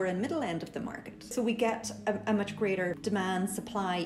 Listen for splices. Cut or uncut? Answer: cut